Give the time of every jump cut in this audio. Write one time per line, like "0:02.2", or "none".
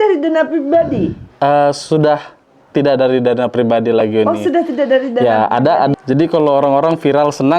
0:05.9